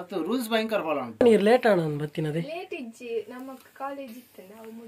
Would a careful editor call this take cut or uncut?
cut